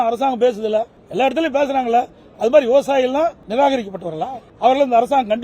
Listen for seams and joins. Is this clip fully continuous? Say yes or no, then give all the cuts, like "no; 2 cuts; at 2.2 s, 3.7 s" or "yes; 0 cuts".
no; 3 cuts; at 1.0 s, 3.4 s, 4.4 s